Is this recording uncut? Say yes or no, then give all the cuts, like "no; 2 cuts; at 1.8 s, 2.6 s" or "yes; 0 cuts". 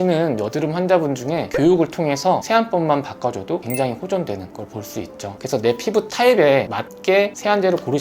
no; 2 cuts; at 1.5 s, 5.4 s